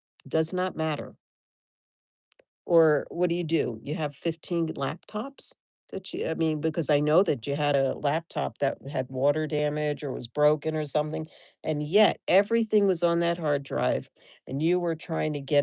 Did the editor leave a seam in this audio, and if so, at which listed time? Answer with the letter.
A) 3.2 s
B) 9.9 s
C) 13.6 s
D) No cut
D